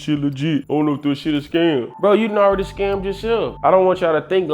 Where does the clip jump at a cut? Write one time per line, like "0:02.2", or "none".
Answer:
0:03.6